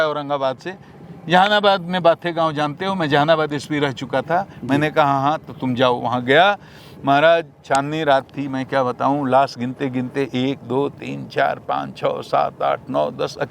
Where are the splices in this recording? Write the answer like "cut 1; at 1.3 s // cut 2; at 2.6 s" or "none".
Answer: none